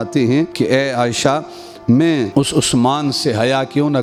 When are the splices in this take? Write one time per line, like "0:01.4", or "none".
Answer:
none